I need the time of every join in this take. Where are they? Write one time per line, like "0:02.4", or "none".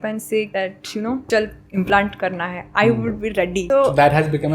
0:01.0
0:03.6